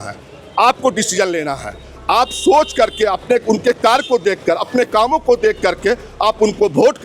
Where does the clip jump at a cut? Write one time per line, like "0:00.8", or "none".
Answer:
none